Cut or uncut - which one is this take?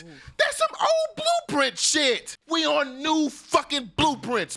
cut